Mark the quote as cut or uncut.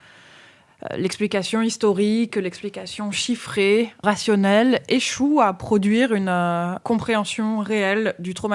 cut